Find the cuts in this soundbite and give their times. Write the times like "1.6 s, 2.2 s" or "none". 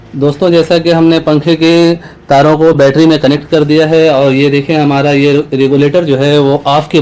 none

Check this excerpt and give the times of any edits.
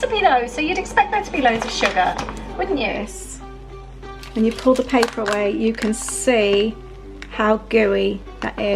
2.9 s

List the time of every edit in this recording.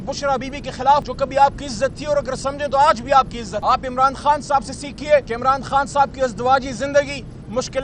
1.1 s, 3.5 s, 5.3 s

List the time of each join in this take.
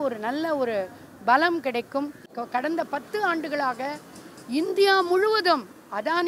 2.4 s

